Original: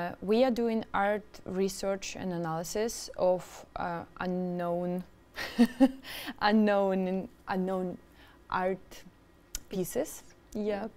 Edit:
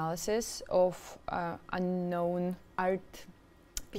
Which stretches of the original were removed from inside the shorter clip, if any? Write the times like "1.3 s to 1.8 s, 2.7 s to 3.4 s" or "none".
5.1 s to 8.4 s